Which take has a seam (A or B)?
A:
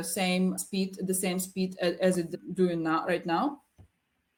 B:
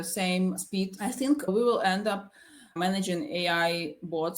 B